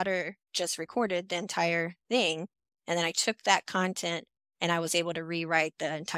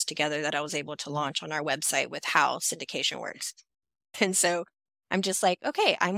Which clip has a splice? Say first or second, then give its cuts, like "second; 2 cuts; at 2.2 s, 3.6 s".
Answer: second; 1 cut; at 4.1 s